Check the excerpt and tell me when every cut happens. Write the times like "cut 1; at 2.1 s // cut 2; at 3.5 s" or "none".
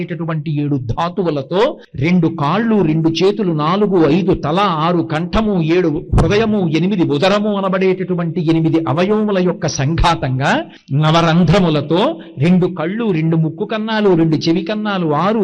cut 1; at 1.9 s // cut 2; at 10.8 s